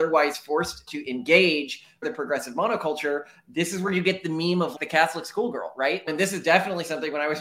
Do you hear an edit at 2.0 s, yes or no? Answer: yes